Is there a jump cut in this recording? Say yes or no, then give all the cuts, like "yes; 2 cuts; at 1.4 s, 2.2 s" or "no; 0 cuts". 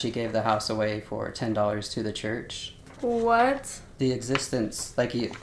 no; 0 cuts